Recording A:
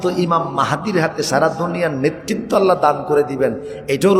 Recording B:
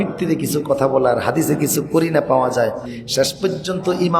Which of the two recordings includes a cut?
B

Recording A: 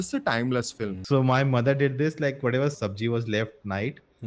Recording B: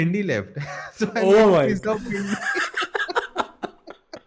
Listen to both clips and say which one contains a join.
A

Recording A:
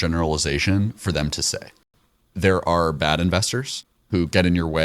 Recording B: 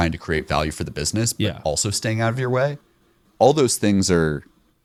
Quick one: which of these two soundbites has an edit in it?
A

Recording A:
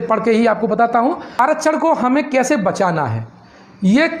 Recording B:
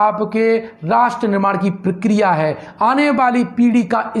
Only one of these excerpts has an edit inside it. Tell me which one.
A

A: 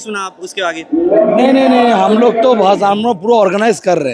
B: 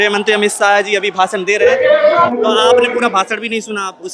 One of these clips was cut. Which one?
B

